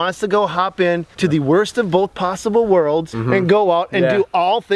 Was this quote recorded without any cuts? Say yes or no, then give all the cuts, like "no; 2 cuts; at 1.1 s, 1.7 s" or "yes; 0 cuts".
no; 2 cuts; at 1.1 s, 3.1 s